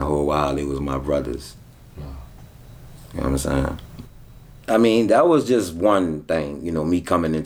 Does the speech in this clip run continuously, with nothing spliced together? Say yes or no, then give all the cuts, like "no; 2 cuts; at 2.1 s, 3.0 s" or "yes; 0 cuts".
yes; 0 cuts